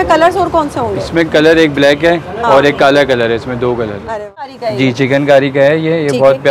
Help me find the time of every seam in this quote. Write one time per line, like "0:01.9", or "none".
0:04.4